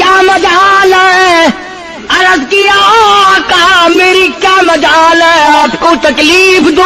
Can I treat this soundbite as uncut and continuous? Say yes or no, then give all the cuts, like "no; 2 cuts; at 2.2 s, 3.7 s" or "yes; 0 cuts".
yes; 0 cuts